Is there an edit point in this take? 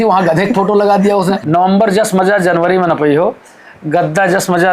yes; 1 cut; at 1.4 s

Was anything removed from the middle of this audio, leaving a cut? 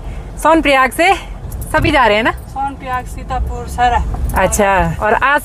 no; 0 cuts

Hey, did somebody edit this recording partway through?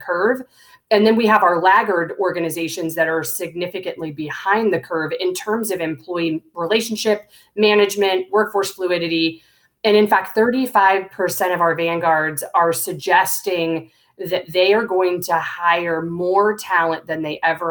no; 0 cuts

